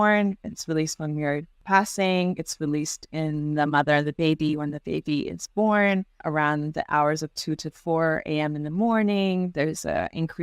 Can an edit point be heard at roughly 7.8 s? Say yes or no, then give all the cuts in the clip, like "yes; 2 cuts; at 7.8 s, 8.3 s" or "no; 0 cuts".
no; 2 cuts; at 1.5 s, 6.2 s